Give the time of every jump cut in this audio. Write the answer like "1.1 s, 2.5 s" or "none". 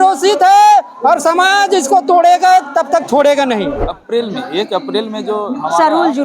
3.9 s